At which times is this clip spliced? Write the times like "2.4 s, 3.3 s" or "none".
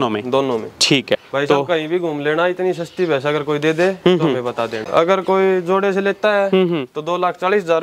1.2 s, 4.8 s